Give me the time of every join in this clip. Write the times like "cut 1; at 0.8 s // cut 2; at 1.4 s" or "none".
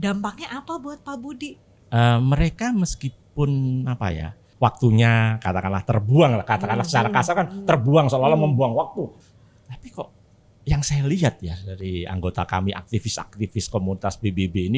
cut 1; at 1.7 s // cut 2; at 4.4 s // cut 3; at 9.2 s